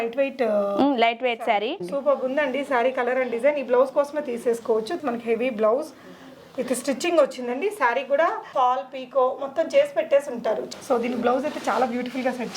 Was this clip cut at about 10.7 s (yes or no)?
yes